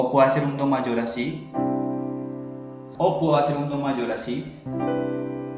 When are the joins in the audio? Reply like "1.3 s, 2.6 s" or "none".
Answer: 2.8 s